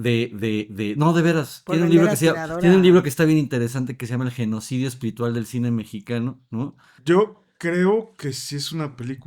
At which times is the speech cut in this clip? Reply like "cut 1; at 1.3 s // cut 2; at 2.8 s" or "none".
cut 1; at 6.9 s

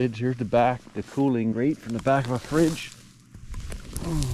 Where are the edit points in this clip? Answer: cut 1; at 1.5 s

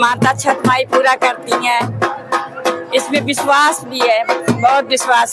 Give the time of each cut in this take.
none

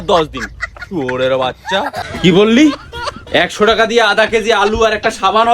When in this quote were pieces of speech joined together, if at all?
cut 1; at 2.0 s

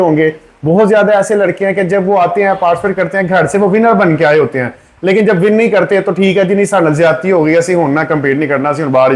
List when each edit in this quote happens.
none

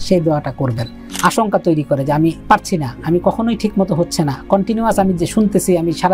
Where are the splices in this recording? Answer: cut 1; at 1.1 s

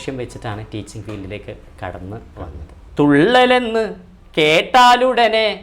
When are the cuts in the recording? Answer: cut 1; at 2.8 s

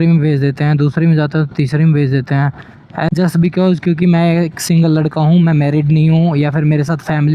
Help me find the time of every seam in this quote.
cut 1; at 3.1 s

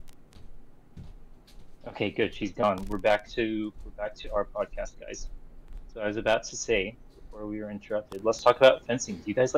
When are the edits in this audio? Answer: none

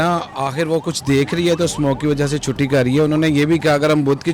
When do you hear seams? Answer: none

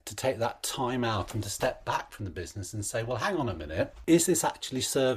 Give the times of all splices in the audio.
cut 1; at 4.0 s

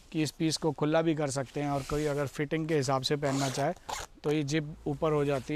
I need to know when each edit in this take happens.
none

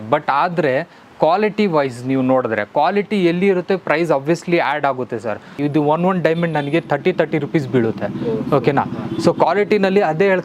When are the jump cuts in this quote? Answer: cut 1; at 5.5 s

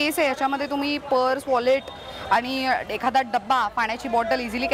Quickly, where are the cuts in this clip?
none

